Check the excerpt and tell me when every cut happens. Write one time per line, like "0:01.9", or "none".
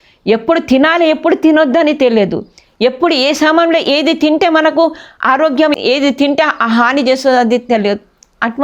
0:05.7